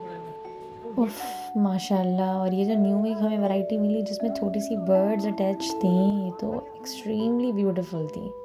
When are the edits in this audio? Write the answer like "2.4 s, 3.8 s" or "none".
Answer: none